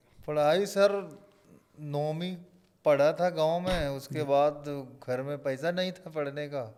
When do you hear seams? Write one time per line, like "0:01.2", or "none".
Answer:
none